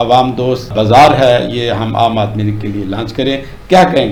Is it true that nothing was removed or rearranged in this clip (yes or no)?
yes